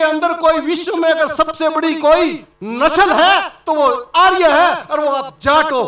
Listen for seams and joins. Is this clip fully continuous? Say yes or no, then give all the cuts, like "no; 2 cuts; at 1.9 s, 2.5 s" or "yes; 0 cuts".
yes; 0 cuts